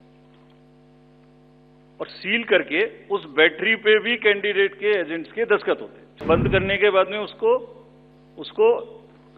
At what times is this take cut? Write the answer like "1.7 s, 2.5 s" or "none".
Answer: 6.2 s